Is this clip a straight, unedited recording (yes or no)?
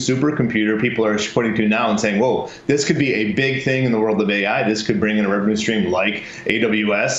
yes